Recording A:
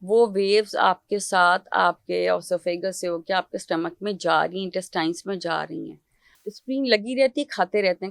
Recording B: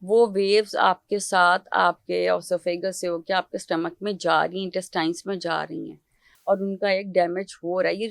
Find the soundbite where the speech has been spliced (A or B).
A